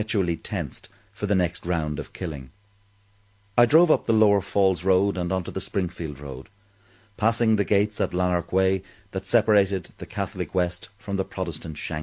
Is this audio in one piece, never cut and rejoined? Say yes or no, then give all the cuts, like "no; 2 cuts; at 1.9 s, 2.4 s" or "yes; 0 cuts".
yes; 0 cuts